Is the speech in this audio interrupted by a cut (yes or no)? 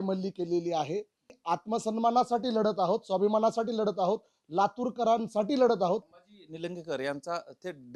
yes